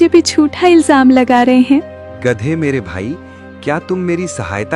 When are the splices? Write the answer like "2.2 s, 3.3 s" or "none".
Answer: 2.0 s